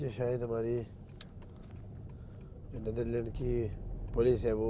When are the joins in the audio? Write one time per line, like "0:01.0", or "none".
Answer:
none